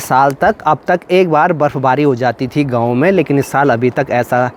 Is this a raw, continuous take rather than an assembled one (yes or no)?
yes